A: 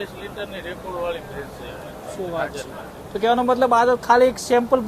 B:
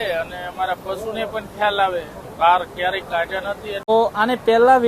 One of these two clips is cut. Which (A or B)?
B